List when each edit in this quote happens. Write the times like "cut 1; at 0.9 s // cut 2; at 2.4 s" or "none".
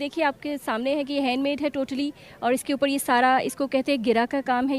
none

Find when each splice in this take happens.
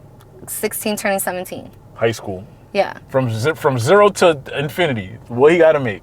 cut 1; at 3.0 s

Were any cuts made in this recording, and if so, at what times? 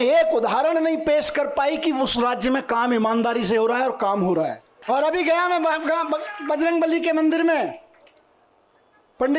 cut 1; at 4.7 s

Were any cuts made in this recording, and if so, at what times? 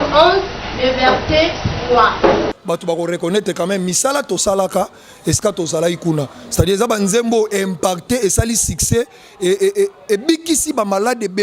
cut 1; at 2.5 s

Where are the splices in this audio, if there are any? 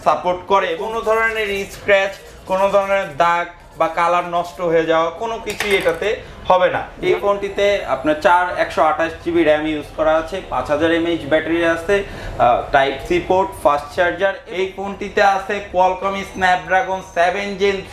cut 1; at 0.9 s // cut 2; at 6.9 s // cut 3; at 14.4 s

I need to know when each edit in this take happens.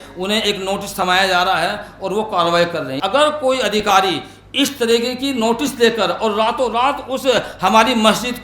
cut 1; at 2.9 s

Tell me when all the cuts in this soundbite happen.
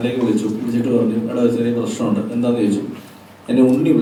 none

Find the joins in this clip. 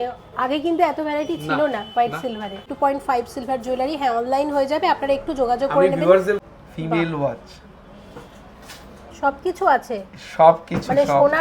cut 1; at 2.7 s // cut 2; at 6.5 s

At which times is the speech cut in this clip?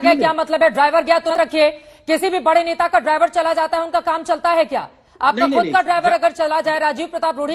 cut 1; at 1.3 s

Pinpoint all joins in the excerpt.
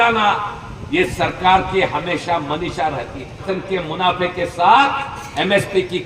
cut 1; at 3.4 s

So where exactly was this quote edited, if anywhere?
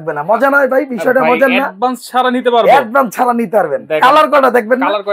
none

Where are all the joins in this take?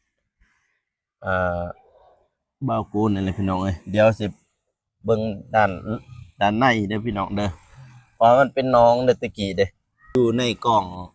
cut 1; at 10.1 s

